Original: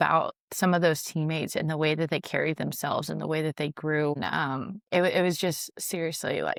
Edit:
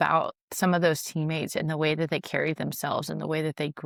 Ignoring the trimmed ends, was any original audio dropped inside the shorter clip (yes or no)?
no